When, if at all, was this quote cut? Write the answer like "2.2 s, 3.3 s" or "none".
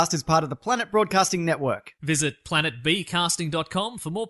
none